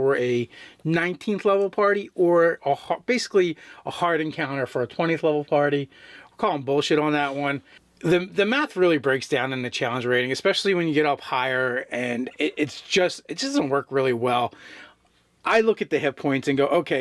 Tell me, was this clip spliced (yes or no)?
no